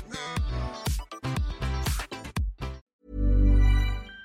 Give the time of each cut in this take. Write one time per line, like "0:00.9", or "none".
0:02.8

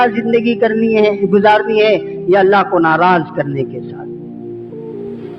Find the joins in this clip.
0:04.4

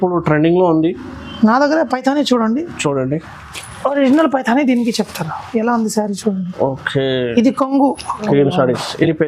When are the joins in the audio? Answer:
0:08.2

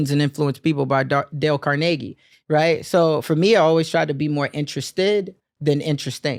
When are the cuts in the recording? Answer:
none

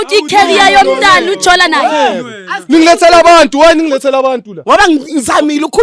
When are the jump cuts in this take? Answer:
0:04.5

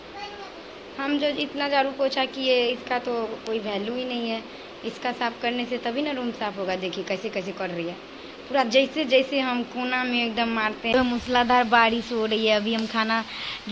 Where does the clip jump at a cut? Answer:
0:10.9

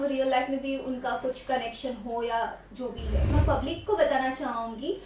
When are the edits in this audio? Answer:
0:03.3

